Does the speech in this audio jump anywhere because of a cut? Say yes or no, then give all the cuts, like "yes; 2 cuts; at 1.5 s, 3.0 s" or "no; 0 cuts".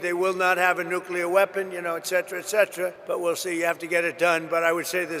yes; 1 cut; at 3.0 s